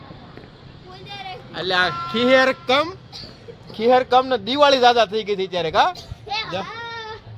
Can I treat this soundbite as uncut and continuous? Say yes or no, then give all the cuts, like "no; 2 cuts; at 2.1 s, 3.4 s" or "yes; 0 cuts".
yes; 0 cuts